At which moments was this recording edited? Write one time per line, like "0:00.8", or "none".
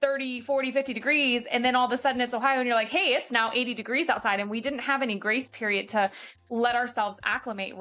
none